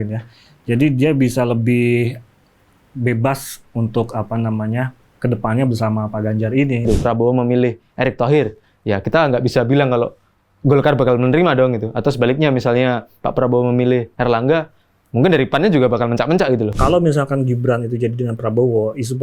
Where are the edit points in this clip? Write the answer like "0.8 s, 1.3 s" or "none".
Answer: 6.8 s, 16.7 s